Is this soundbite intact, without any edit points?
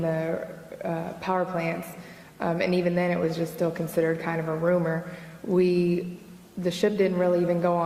yes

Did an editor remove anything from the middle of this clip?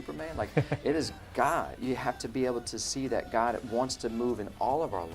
yes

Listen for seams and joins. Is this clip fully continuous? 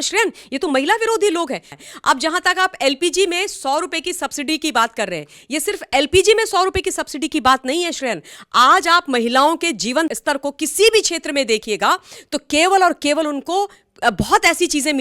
no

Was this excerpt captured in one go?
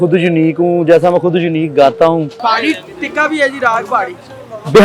no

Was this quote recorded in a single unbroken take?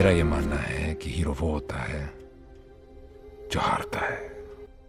yes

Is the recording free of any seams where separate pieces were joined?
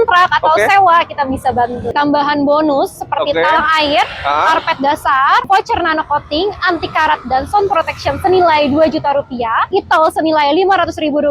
no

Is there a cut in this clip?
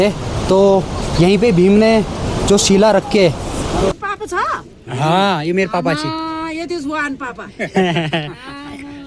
yes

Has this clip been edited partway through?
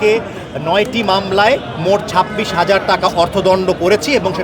no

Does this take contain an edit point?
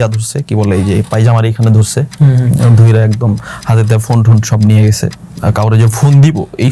no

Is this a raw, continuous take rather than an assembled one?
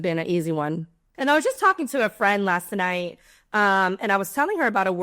no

